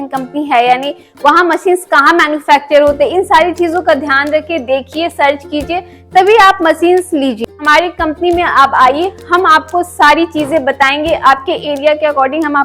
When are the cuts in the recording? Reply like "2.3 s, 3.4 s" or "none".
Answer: 7.6 s